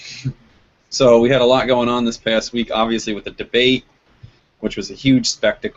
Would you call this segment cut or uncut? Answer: uncut